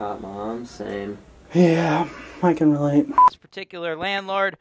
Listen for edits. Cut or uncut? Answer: cut